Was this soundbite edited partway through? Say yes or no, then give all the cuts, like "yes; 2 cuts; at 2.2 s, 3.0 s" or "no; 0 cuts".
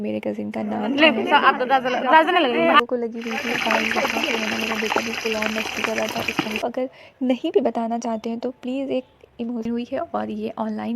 yes; 3 cuts; at 2.8 s, 6.6 s, 9.7 s